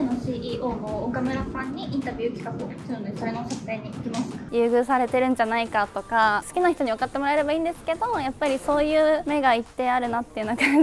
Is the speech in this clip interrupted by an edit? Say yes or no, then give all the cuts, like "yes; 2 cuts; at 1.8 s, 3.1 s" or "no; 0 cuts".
yes; 2 cuts; at 4.4 s, 6.4 s